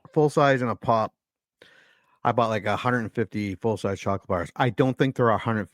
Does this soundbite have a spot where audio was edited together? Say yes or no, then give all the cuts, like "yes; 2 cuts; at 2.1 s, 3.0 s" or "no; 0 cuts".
no; 0 cuts